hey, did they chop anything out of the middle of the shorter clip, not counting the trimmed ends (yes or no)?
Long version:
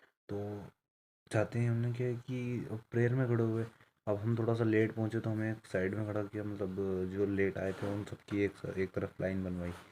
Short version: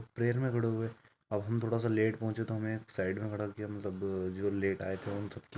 no